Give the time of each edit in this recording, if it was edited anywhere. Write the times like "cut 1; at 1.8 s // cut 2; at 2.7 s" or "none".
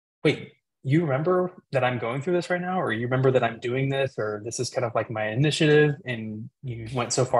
none